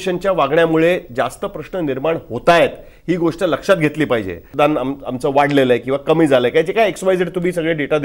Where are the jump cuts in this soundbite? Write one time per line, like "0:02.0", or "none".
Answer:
0:04.4